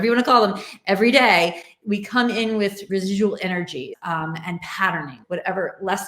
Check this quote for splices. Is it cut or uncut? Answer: cut